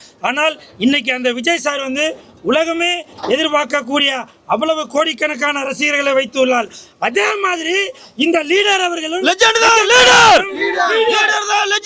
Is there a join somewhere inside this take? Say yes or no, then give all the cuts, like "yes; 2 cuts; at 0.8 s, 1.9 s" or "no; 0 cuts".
no; 0 cuts